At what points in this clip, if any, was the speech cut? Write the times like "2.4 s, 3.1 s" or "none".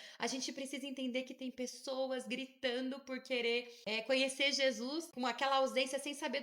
3.8 s, 5.1 s